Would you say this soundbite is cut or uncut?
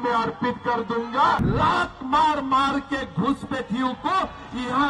cut